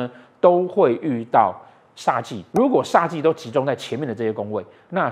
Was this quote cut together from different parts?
yes; 1 cut; at 2.4 s

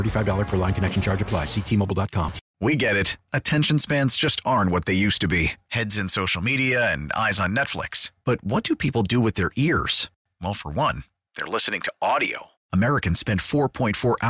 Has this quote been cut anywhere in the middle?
yes; 1 cut; at 2.4 s

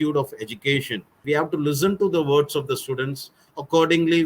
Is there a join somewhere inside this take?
yes; 1 cut; at 1.2 s

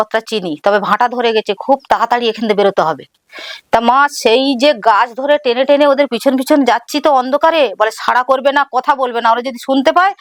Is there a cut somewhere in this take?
no; 0 cuts

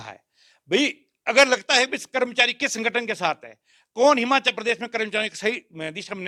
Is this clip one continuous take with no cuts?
yes; 0 cuts

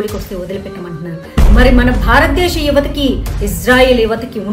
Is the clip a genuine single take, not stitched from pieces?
no; 1 cut; at 1.2 s

